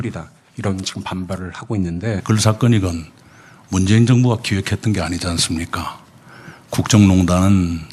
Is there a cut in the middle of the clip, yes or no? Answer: no